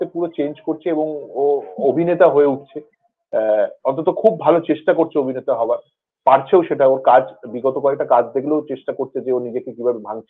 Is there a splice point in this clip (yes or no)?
no